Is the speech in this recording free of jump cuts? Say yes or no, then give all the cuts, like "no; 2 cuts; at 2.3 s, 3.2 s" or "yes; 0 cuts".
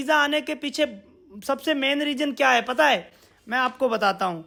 yes; 0 cuts